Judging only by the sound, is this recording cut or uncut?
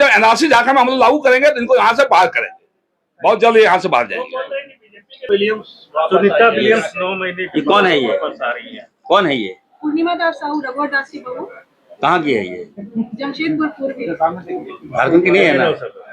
cut